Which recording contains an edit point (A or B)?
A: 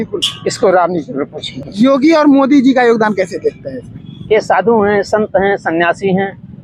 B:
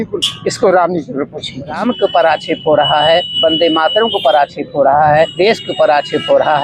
B